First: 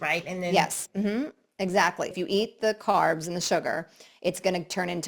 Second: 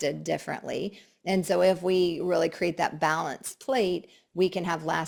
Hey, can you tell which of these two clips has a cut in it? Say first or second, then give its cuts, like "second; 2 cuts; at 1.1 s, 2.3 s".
first; 1 cut; at 2.1 s